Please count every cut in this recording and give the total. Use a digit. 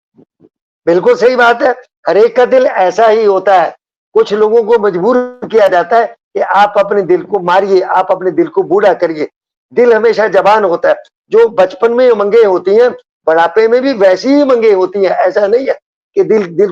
0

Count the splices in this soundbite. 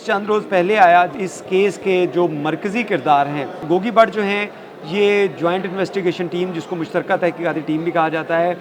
2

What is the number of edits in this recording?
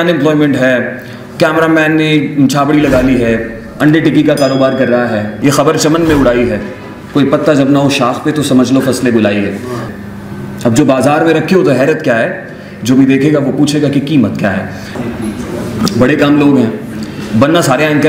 3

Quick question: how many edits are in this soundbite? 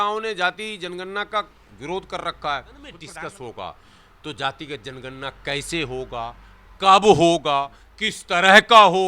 1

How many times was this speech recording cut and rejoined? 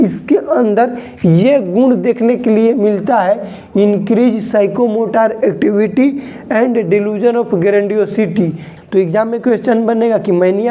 1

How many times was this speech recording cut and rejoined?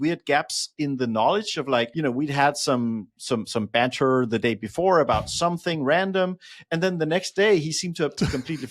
1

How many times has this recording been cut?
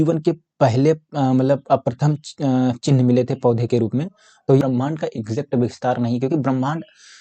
1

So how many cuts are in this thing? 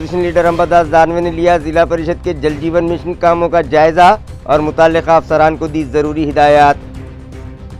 0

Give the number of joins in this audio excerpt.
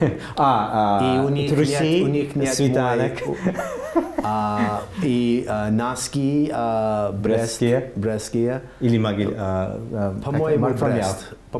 0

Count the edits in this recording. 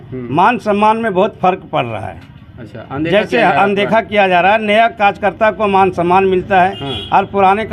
0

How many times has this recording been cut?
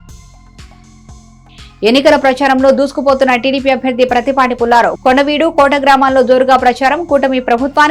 1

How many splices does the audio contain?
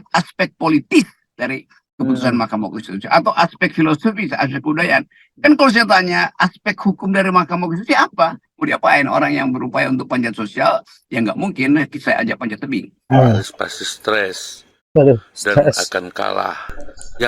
2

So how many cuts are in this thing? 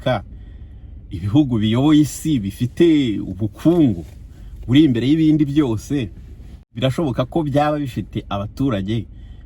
1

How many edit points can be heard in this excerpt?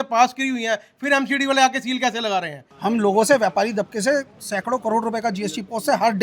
1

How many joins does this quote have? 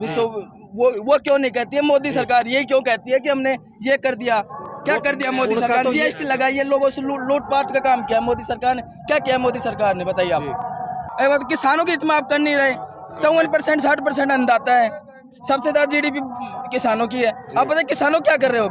0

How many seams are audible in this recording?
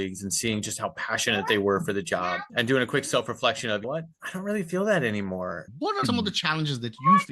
1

